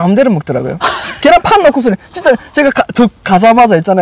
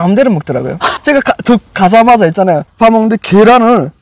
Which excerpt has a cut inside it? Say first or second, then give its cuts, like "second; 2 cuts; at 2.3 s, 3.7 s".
second; 2 cuts; at 1.0 s, 2.7 s